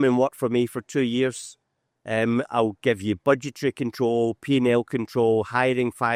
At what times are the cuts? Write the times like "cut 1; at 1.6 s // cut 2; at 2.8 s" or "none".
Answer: none